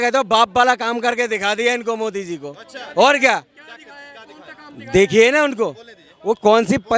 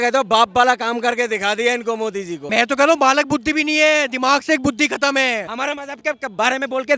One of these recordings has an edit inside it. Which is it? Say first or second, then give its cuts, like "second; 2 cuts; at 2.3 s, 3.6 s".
second; 2 cuts; at 2.3 s, 5.5 s